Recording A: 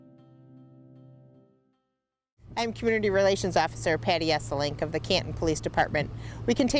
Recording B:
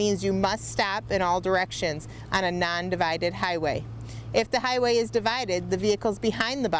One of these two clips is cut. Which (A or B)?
A